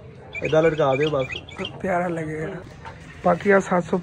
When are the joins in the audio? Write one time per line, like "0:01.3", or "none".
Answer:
0:02.7